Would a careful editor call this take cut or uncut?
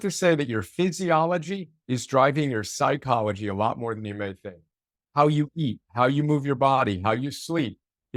uncut